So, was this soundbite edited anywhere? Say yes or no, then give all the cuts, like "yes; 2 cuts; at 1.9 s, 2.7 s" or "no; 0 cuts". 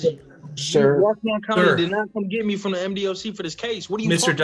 no; 0 cuts